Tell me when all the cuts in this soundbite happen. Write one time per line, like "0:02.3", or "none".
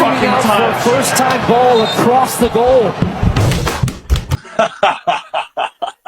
0:04.4